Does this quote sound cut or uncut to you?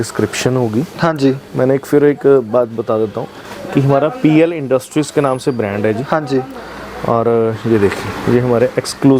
uncut